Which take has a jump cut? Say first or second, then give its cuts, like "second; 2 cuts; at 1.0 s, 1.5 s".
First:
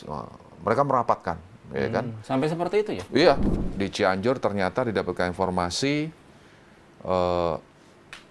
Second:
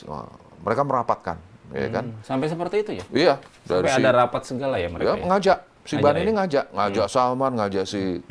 first; 1 cut; at 3.5 s